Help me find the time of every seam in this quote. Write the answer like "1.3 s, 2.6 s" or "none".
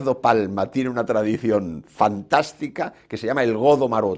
none